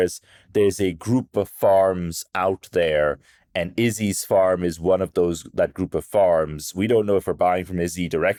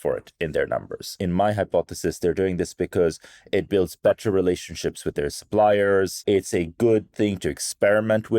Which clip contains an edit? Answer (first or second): second